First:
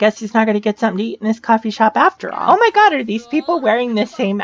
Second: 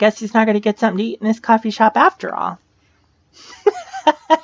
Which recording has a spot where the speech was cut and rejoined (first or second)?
first